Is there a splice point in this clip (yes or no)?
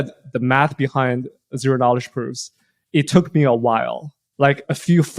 no